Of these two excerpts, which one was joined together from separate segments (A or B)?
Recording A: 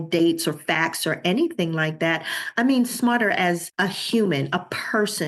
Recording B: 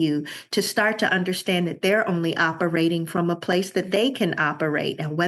A